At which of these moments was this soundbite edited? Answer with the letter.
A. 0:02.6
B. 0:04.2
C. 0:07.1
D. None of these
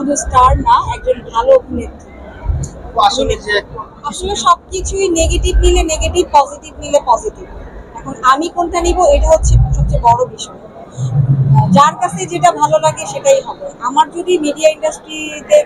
B